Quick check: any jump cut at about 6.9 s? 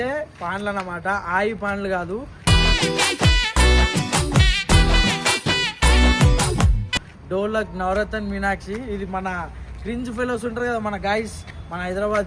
yes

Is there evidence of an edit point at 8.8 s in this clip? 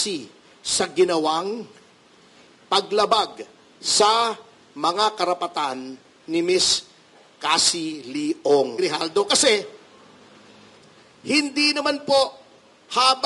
yes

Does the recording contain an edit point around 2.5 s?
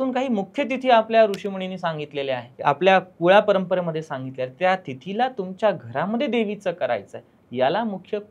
yes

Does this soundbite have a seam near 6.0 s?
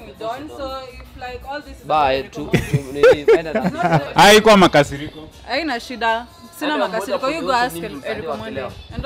no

